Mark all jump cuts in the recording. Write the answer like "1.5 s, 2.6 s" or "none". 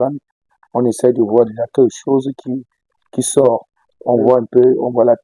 none